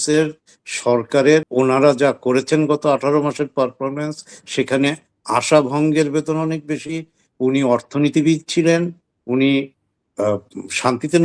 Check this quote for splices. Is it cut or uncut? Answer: cut